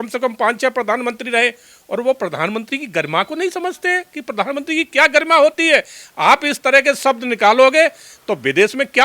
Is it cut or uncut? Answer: uncut